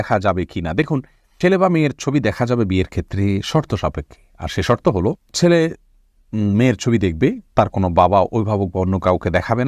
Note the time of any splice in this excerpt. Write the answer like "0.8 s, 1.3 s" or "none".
none